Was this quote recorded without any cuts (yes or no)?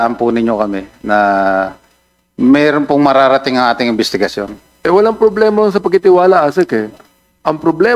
yes